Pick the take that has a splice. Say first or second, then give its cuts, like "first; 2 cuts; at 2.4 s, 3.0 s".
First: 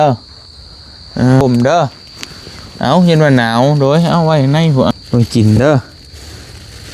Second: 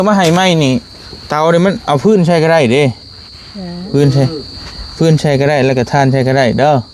first; 2 cuts; at 1.4 s, 4.9 s